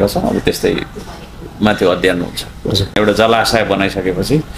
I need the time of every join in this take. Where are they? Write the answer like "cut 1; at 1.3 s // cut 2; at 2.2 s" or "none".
cut 1; at 2.9 s